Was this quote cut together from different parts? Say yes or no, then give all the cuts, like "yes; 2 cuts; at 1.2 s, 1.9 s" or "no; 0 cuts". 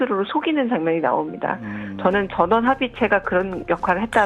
no; 0 cuts